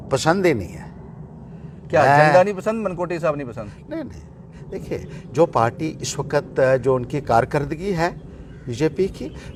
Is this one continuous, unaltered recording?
yes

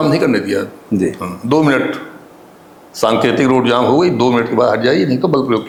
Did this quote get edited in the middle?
no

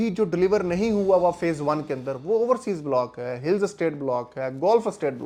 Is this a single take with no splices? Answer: yes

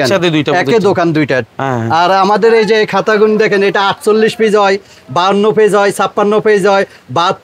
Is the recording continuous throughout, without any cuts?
yes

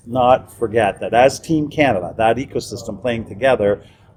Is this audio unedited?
yes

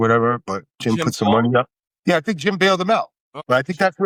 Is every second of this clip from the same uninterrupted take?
yes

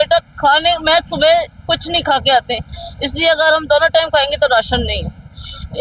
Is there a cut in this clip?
no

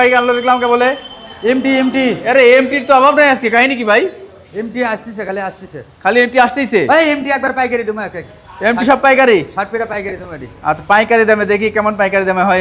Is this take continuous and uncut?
yes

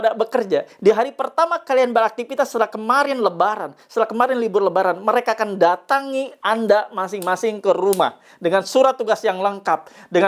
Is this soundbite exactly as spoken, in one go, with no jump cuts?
yes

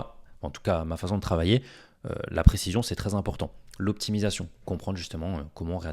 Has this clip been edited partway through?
no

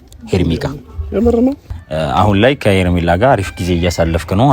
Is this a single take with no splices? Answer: no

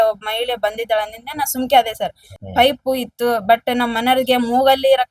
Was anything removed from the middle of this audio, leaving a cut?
yes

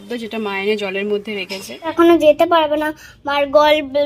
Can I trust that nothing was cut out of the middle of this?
no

